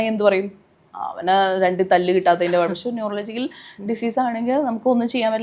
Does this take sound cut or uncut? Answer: uncut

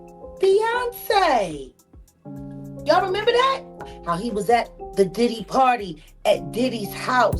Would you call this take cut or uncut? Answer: cut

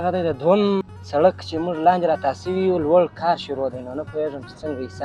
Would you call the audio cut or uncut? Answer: cut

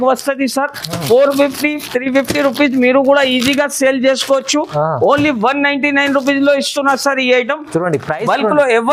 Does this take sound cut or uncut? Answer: uncut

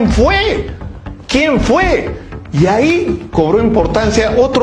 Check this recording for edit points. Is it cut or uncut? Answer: uncut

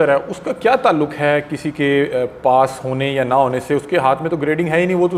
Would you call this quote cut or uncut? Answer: uncut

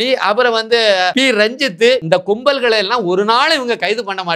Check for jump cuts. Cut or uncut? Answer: cut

